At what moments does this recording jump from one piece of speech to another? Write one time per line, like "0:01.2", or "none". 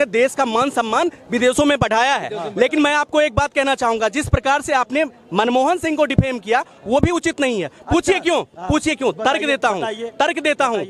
none